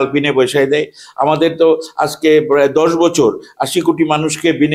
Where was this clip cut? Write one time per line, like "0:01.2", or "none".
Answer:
none